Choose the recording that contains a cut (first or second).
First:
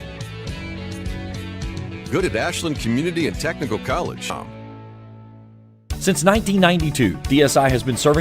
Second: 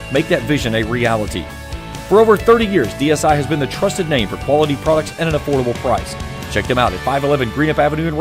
first